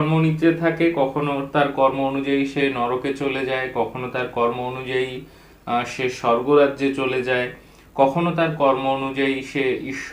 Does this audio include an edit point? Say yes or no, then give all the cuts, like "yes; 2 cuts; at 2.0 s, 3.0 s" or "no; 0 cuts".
no; 0 cuts